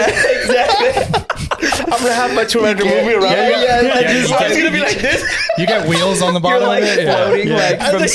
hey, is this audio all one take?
yes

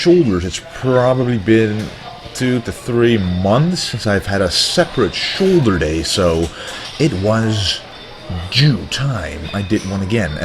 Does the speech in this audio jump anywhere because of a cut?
yes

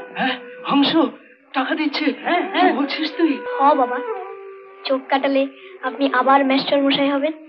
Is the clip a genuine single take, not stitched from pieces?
yes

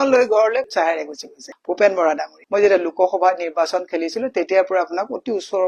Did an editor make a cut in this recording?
yes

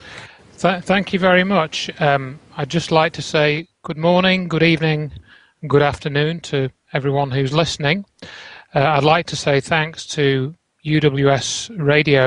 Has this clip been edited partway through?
no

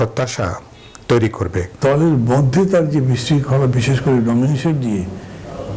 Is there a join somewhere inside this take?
yes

